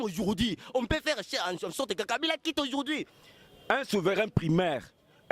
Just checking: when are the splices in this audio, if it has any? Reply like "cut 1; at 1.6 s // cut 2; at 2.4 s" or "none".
cut 1; at 3.2 s

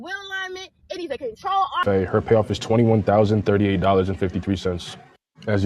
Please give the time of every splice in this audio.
cut 1; at 1.8 s

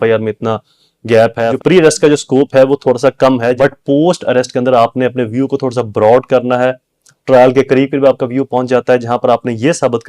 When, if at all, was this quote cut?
cut 1; at 1.5 s // cut 2; at 3.6 s

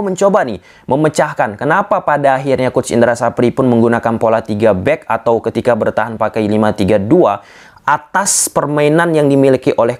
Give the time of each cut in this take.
none

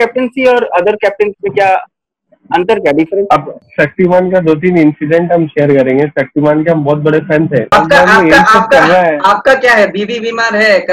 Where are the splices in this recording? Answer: cut 1; at 3.6 s // cut 2; at 7.7 s

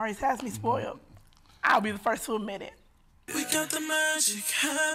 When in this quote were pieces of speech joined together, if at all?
cut 1; at 3.2 s

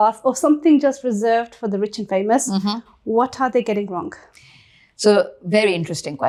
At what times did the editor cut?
none

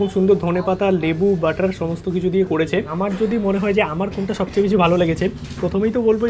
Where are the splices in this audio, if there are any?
cut 1; at 2.9 s

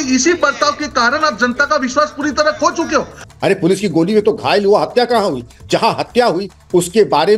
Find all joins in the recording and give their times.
cut 1; at 3.2 s

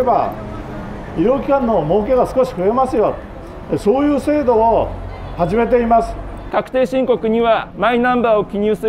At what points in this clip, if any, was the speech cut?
cut 1; at 6.5 s // cut 2; at 7.7 s

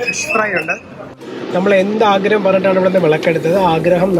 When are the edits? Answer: cut 1; at 1.2 s

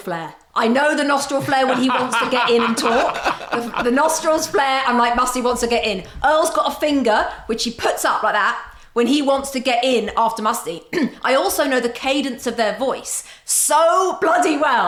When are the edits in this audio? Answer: none

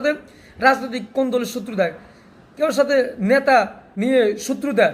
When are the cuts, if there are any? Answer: cut 1; at 3.8 s

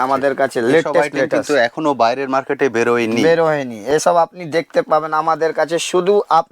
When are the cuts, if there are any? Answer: none

